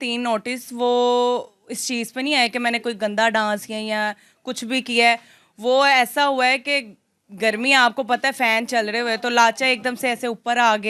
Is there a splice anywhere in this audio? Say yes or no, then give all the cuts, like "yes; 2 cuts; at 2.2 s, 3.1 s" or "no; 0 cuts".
no; 0 cuts